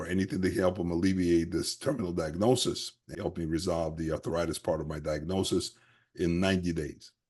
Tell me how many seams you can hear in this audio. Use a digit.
1